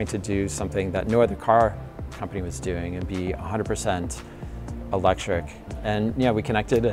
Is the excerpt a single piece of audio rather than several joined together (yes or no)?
yes